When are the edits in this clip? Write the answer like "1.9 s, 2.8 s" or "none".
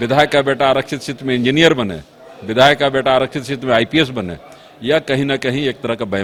none